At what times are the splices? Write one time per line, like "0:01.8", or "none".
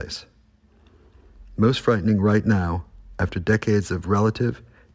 0:01.1